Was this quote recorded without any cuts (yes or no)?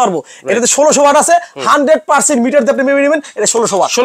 yes